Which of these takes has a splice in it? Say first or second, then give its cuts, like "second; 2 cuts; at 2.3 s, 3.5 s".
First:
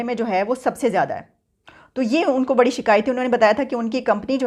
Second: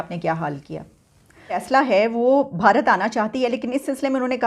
second; 1 cut; at 1.6 s